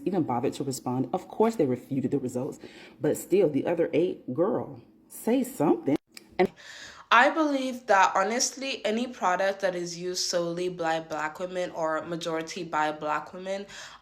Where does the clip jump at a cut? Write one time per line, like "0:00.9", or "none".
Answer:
0:06.5